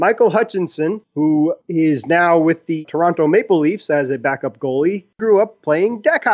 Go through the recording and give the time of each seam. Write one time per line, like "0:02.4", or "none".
0:05.2